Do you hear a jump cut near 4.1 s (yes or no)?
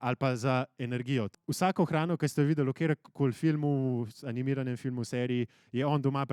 no